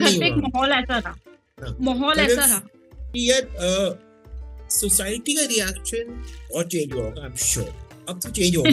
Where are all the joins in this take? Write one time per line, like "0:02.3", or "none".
0:03.1

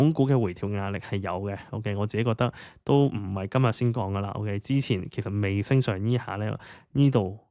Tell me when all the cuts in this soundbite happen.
none

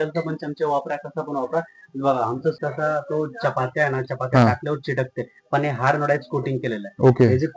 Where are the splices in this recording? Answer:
0:02.5

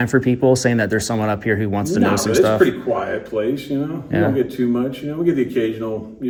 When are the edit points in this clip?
none

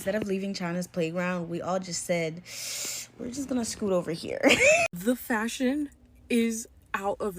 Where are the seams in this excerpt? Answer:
0:04.9

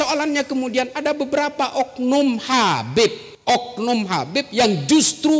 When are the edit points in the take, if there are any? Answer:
0:03.3

